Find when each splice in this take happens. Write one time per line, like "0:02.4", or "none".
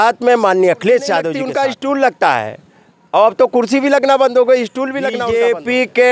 0:01.3
0:05.1